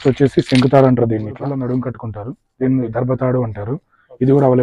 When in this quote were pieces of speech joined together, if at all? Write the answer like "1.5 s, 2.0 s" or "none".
1.6 s